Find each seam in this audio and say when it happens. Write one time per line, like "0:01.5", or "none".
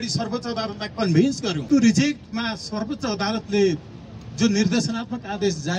0:01.7